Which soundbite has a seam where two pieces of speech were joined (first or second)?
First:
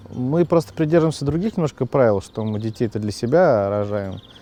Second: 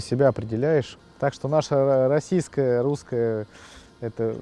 second